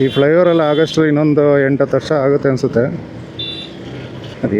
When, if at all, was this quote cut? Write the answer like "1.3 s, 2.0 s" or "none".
none